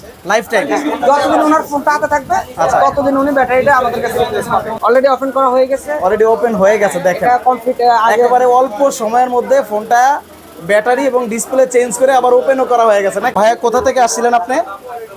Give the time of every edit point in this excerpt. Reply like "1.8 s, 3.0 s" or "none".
4.7 s, 13.3 s